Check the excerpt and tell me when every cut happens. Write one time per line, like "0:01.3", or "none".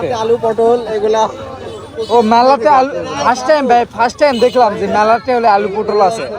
none